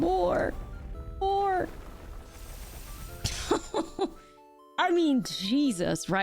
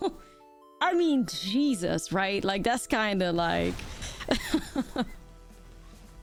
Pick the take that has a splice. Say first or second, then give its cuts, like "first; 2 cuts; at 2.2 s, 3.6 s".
first; 1 cut; at 2.2 s